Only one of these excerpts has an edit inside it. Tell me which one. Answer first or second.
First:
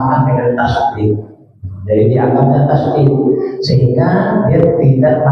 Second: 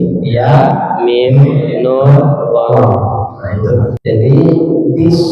second